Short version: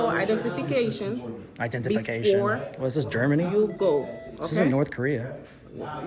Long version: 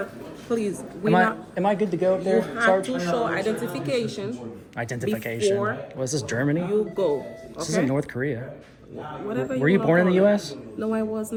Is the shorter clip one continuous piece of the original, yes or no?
yes